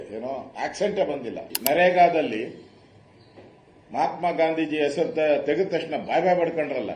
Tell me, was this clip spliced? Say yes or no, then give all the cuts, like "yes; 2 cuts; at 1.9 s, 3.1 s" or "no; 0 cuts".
yes; 1 cut; at 1.5 s